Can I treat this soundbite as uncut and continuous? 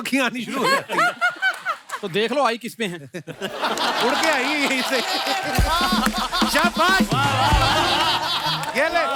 yes; 0 cuts

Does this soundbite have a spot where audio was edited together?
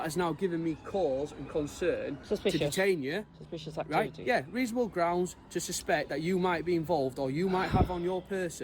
no; 0 cuts

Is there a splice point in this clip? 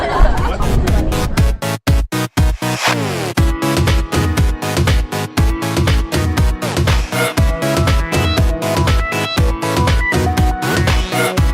yes; 1 cut; at 9.5 s

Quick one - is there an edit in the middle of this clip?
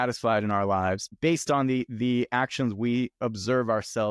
yes; 1 cut; at 1.1 s

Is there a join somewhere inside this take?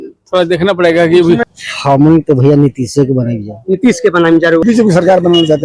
yes; 2 cuts; at 1.5 s, 4.6 s

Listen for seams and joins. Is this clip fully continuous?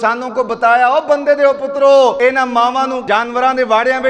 no; 2 cuts; at 2.2 s, 3.0 s

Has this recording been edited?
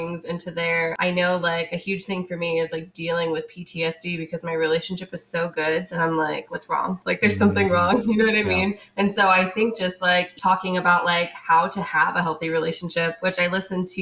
yes; 3 cuts; at 0.9 s, 7.0 s, 10.3 s

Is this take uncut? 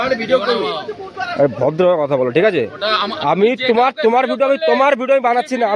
yes; 0 cuts

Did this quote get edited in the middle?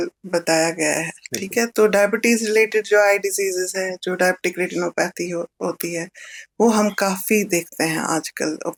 no; 0 cuts

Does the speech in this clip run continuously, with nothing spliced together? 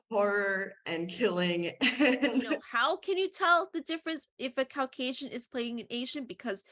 no; 1 cut; at 2.6 s

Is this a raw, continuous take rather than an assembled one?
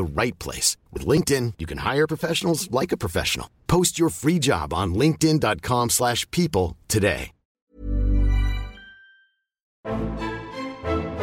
no; 2 cuts; at 7.6 s, 9.8 s

